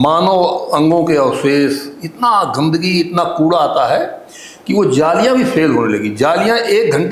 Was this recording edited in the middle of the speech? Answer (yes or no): no